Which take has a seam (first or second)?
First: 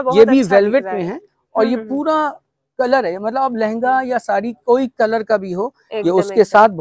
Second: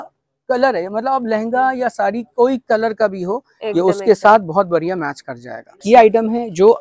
second